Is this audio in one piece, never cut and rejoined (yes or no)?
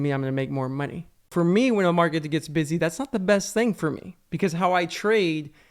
no